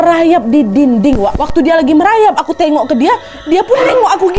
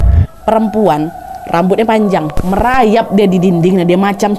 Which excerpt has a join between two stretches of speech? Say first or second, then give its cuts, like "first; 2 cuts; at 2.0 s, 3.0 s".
second; 1 cut; at 2.4 s